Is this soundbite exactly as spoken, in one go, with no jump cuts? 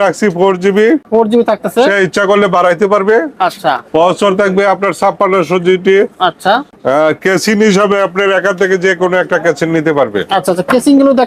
yes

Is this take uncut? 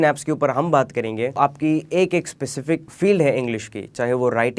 no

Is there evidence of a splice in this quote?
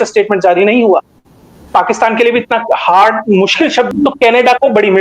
yes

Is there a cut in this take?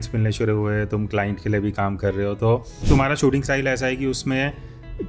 yes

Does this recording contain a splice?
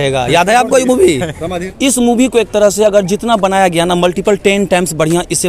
yes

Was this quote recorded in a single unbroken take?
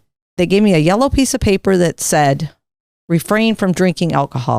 yes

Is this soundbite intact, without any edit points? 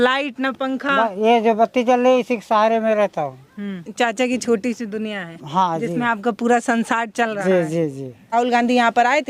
no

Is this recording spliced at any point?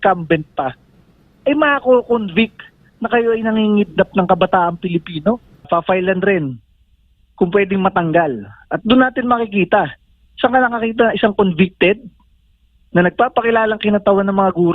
yes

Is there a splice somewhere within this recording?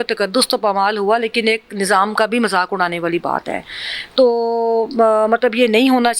no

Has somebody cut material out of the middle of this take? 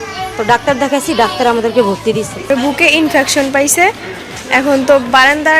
yes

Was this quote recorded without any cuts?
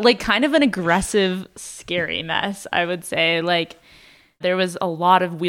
no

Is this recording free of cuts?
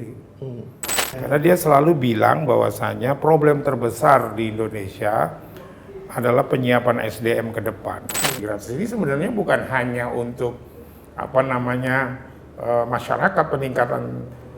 no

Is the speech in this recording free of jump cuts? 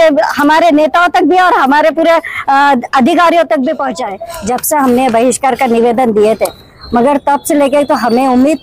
yes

